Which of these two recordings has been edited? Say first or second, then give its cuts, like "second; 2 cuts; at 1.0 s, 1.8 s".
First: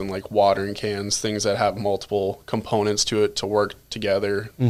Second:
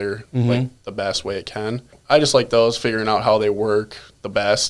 second; 1 cut; at 2.0 s